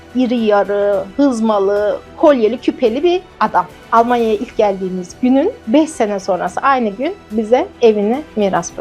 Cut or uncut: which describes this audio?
cut